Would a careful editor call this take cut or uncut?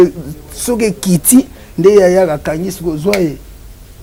uncut